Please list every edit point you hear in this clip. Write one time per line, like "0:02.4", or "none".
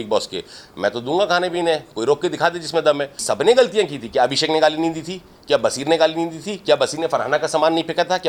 none